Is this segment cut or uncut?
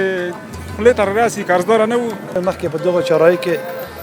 cut